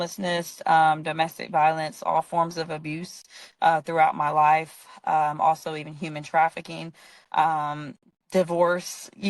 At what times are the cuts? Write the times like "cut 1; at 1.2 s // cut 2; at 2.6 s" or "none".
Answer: none